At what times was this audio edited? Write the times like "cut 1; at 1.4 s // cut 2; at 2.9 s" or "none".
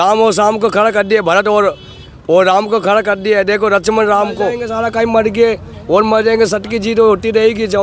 cut 1; at 4.6 s